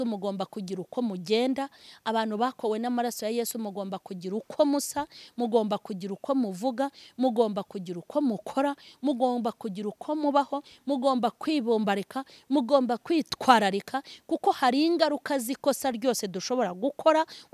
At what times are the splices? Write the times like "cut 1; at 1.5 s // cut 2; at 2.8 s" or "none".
none

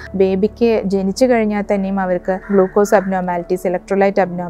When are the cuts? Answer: cut 1; at 2.4 s

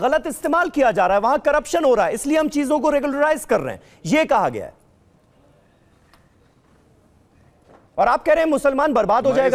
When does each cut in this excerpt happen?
none

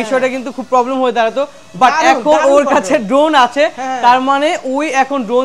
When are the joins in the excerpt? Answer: none

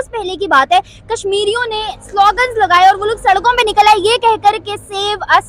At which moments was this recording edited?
none

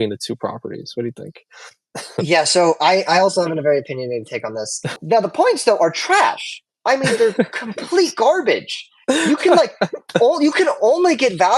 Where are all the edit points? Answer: cut 1; at 5.0 s

